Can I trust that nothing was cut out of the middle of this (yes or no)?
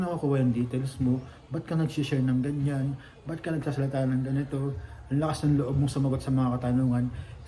yes